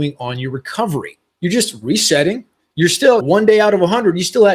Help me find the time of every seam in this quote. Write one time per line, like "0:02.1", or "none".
0:01.2
0:03.2